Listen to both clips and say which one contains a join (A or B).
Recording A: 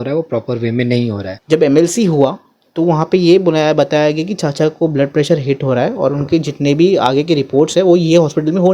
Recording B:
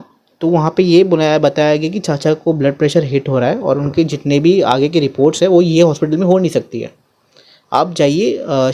A